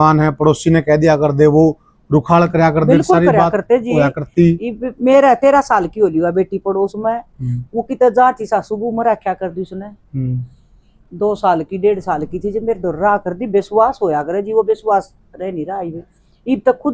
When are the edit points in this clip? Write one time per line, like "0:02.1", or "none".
none

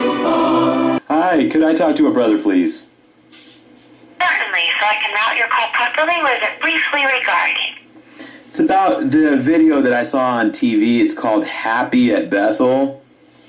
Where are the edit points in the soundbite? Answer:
0:05.1

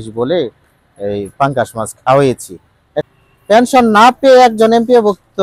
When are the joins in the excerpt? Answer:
0:03.0

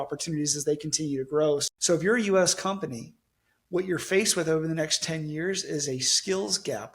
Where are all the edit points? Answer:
0:01.7

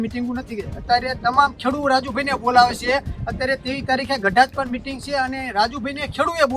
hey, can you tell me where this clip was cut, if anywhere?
none

